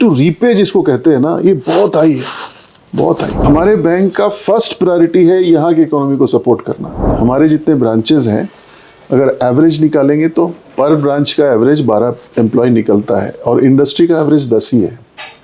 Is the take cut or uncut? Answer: cut